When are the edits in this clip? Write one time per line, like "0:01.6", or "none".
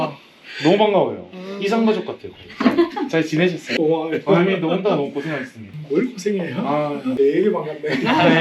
0:03.7
0:07.1